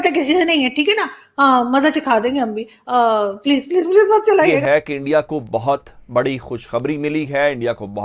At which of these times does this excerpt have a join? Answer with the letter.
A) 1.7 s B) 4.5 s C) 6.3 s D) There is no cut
B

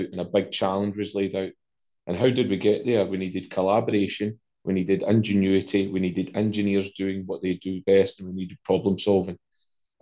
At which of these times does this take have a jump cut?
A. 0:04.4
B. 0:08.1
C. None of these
C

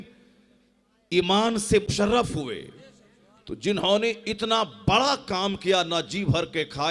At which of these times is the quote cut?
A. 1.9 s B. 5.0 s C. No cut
A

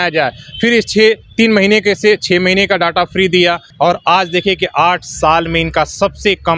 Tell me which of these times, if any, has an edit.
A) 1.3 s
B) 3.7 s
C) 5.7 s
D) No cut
B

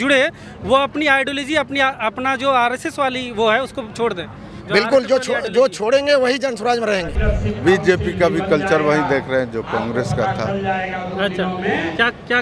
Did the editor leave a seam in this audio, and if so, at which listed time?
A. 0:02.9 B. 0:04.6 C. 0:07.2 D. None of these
C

